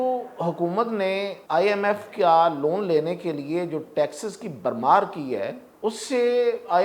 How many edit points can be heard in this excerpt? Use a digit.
2